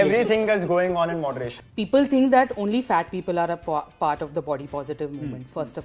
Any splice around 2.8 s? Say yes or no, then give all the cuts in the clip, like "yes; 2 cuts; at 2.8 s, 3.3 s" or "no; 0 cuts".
no; 1 cut; at 1.5 s